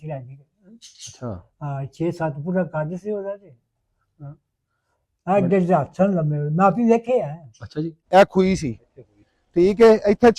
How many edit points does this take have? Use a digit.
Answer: 1